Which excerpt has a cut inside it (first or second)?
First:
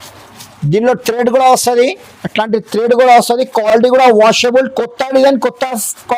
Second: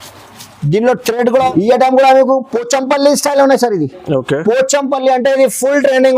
second